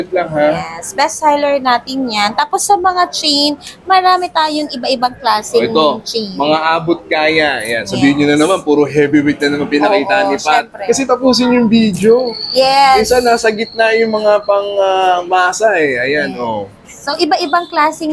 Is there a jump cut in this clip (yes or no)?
no